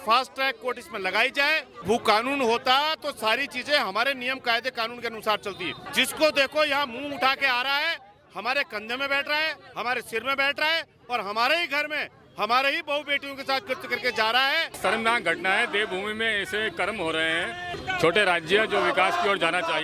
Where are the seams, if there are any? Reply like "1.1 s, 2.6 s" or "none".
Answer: 1.8 s, 5.8 s, 14.8 s, 17.8 s